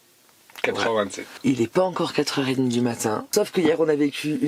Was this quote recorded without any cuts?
no; 2 cuts; at 1.2 s, 3.3 s

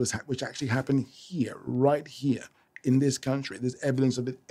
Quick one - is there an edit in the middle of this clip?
no; 0 cuts

